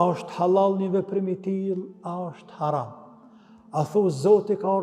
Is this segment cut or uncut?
uncut